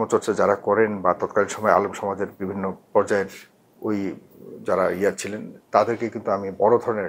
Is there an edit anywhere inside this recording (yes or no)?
no